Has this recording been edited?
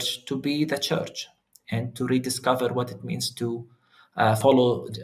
no; 0 cuts

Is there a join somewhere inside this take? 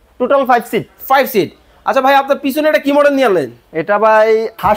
yes; 1 cut; at 1.7 s

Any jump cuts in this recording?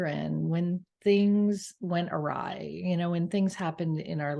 no; 0 cuts

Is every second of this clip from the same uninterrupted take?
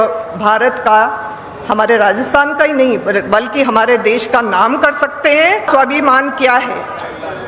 no; 1 cut; at 5.7 s

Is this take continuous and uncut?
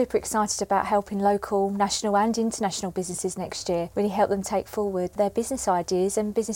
no; 2 cuts; at 3.9 s, 5.1 s

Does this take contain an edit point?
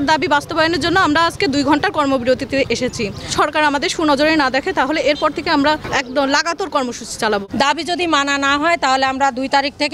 yes; 3 cuts; at 3.3 s, 5.8 s, 7.5 s

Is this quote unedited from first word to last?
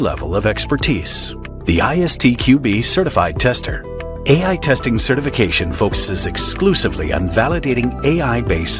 no; 1 cut; at 4.1 s

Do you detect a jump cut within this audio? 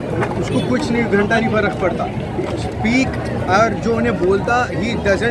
no; 0 cuts

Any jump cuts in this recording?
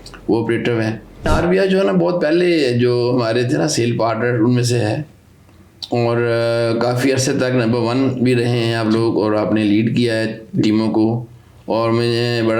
yes; 1 cut; at 1.3 s

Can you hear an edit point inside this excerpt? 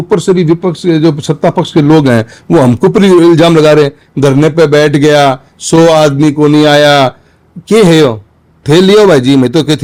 no; 0 cuts

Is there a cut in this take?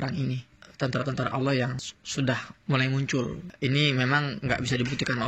yes; 2 cuts; at 2.5 s, 3.5 s

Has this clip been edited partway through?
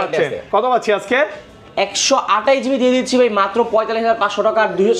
no; 0 cuts

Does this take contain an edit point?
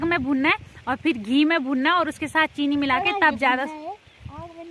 no; 0 cuts

